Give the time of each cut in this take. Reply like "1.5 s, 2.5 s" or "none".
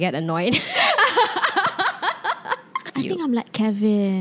2.9 s